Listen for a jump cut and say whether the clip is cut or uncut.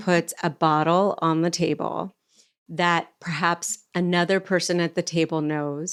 uncut